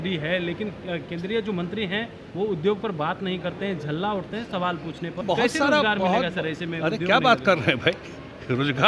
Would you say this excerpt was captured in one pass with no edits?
no; 1 cut; at 5.2 s

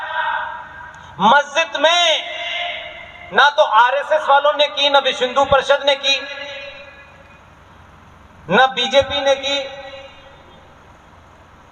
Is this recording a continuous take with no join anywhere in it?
yes; 0 cuts

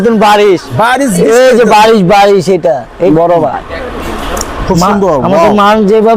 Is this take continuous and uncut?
no; 1 cut; at 3.1 s

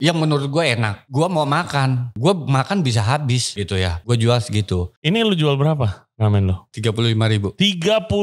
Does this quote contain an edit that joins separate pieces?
yes; 5 cuts; at 1.0 s, 2.1 s, 3.7 s, 4.9 s, 6.7 s

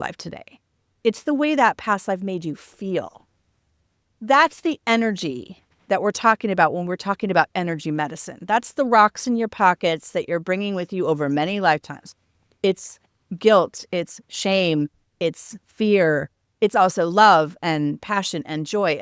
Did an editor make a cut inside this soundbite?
no; 0 cuts

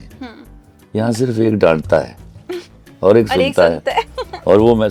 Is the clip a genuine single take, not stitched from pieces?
yes; 0 cuts

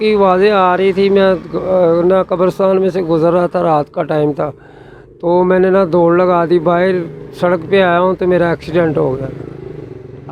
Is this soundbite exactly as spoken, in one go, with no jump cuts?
yes; 0 cuts

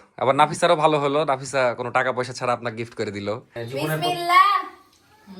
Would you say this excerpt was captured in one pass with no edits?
no; 1 cut; at 3.6 s

